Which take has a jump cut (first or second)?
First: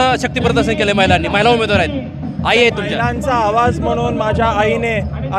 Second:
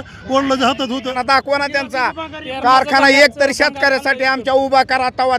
second